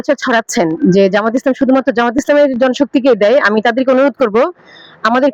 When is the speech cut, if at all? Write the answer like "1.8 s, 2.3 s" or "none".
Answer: none